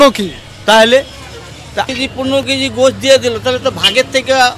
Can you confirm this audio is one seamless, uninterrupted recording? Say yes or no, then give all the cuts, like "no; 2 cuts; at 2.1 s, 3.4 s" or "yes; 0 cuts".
no; 1 cut; at 1.9 s